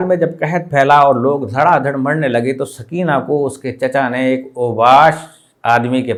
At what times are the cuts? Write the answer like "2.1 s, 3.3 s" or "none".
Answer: none